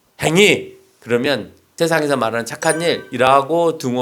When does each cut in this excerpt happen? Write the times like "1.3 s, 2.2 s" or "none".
1.7 s